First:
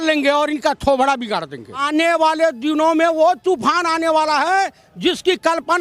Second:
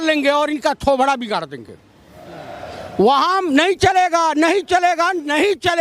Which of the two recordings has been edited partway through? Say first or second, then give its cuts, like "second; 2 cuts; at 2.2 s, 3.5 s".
first; 1 cut; at 1.8 s